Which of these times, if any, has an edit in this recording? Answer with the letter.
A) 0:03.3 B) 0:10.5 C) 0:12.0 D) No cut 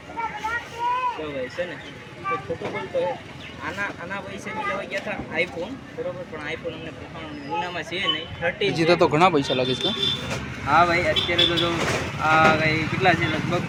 D